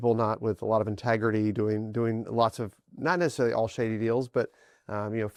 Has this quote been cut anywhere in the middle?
no; 0 cuts

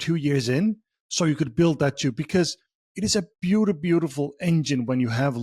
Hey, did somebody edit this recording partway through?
no; 0 cuts

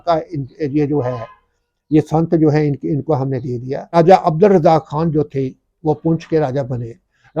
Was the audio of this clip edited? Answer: yes; 1 cut; at 4.0 s

